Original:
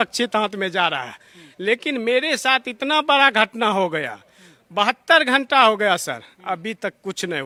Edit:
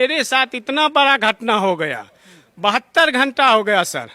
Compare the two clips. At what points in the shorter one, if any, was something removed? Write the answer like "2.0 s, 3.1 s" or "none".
none